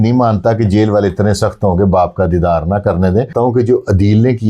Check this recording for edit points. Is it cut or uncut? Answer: cut